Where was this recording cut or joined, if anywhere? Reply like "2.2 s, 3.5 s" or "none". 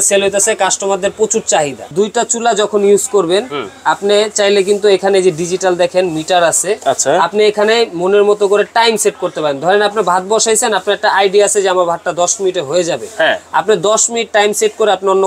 1.8 s